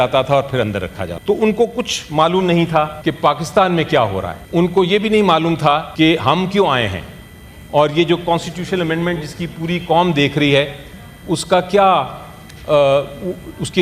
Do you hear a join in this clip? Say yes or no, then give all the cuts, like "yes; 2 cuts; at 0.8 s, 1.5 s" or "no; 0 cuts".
yes; 4 cuts; at 1.1 s, 2.9 s, 4.4 s, 5.9 s